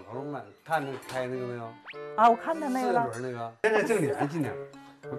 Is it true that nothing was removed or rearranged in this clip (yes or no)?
no